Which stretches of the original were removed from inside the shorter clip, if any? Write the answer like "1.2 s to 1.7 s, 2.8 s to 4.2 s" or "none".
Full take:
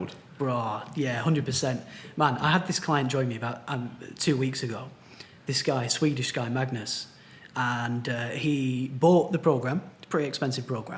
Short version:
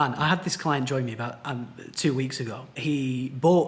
5.0 s to 8.3 s